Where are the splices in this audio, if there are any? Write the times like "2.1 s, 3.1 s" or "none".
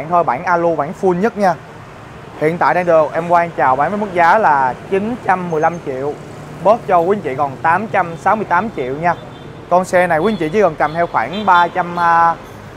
none